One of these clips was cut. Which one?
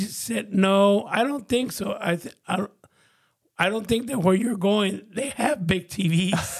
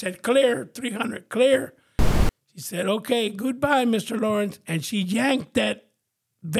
second; 1 cut; at 2.1 s

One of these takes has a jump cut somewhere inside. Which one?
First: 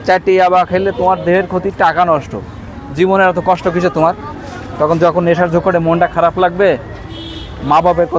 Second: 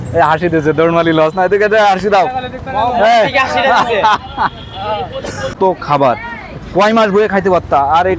second; 1 cut; at 5.5 s

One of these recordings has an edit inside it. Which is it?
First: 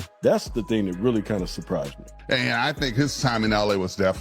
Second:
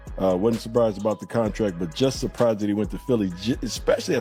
first; 1 cut; at 2.1 s

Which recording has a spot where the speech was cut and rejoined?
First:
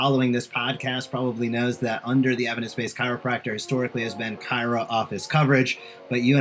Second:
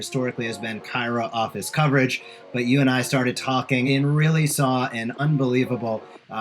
second; 2 cuts; at 3.9 s, 5.2 s

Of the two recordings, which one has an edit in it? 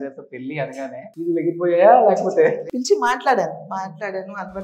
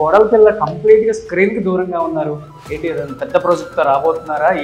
first; 2 cuts; at 1.1 s, 2.6 s

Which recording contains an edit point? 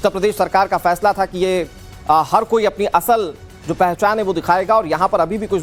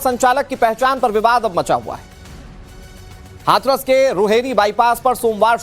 second; 1 cut; at 4.3 s

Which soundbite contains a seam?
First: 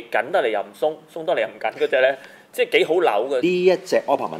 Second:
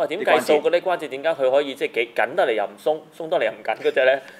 first; 1 cut; at 3.4 s

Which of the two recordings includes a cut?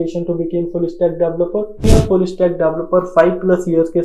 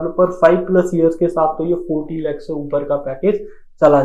first; 1 cut; at 1.8 s

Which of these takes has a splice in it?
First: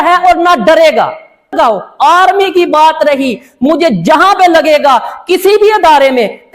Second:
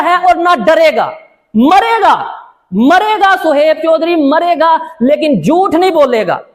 first; 1 cut; at 1.5 s

